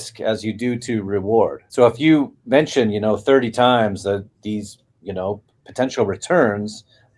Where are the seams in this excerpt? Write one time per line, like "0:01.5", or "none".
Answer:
0:01.6